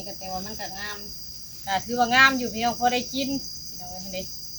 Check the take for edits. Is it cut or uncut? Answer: uncut